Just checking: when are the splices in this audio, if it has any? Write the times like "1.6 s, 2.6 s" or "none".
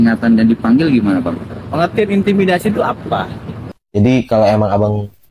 3.6 s